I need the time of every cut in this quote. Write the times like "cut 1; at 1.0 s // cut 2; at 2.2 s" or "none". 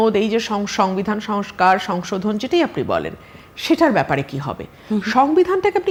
none